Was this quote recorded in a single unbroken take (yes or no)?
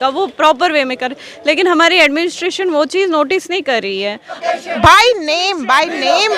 no